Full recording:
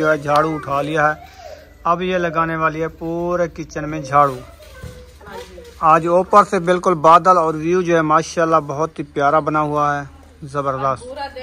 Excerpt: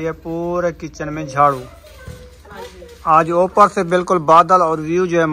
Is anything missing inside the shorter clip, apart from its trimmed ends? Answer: no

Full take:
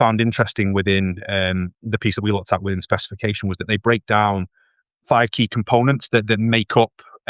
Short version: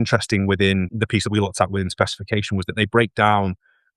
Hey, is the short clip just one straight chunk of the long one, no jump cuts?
no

